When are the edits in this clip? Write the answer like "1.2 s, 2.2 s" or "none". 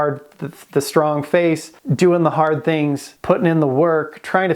1.8 s, 3.1 s